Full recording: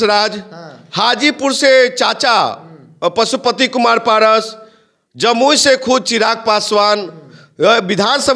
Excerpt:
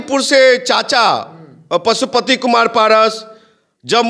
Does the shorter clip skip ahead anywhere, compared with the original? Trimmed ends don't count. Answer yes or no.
no